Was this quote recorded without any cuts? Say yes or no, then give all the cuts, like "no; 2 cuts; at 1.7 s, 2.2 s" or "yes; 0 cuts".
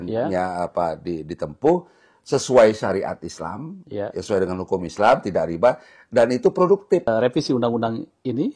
no; 1 cut; at 7.1 s